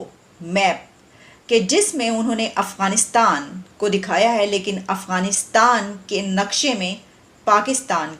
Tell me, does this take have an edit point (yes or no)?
no